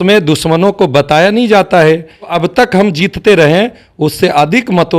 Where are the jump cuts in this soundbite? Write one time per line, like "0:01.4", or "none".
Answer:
0:02.3